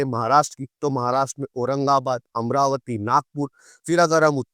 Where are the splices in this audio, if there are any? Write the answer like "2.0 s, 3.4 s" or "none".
none